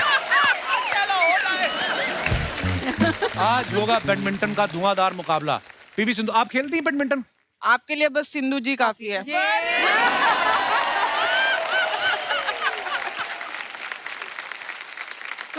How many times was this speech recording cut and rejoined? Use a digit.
1